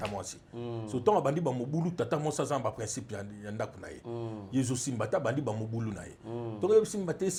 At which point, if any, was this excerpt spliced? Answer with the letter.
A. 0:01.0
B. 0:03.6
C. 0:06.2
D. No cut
D